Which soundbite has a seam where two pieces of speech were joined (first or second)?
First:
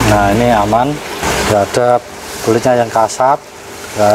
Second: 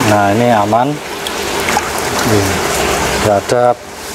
first